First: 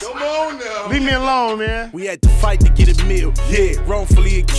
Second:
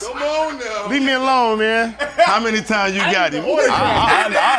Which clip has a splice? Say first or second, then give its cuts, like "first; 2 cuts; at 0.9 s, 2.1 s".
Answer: first; 1 cut; at 1.9 s